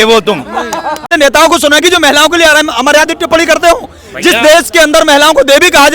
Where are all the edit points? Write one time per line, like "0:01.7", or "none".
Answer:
0:01.1